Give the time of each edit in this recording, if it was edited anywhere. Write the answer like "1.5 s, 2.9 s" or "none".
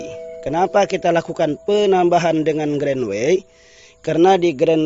none